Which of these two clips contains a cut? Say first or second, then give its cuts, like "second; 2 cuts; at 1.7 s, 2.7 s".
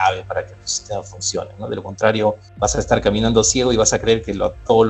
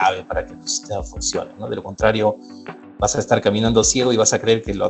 first; 1 cut; at 2.5 s